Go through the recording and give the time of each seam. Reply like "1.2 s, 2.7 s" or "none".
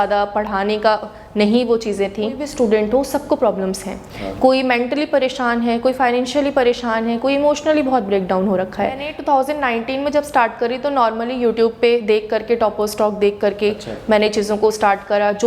2.4 s, 9.1 s

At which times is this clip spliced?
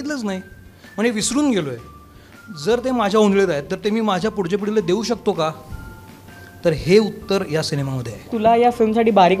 8.2 s

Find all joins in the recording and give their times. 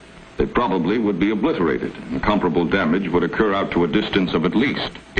4.3 s

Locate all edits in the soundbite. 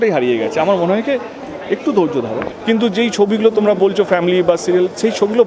2.4 s

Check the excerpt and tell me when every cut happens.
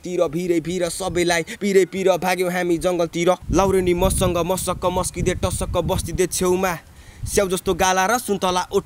3.4 s

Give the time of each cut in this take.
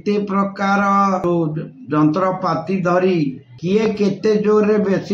1.2 s, 3.5 s

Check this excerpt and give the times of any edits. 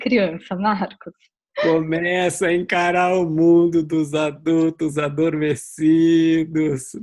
none

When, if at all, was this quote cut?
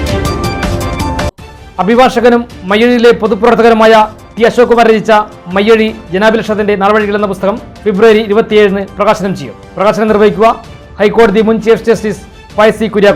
1.3 s

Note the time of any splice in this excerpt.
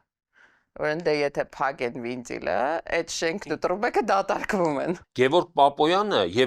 5.1 s

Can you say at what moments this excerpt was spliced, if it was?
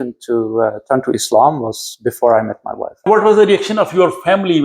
3.1 s

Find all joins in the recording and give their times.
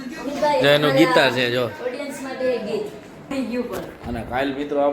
3.3 s

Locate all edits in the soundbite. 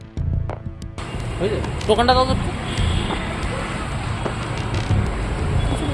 1.0 s

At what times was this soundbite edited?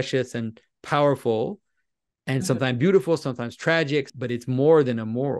4.1 s

